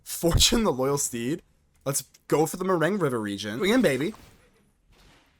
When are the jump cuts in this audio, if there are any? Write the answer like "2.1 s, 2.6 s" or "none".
3.6 s